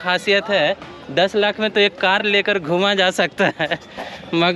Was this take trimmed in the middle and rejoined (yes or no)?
no